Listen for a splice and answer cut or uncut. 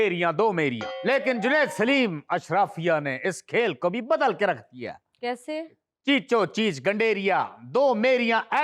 uncut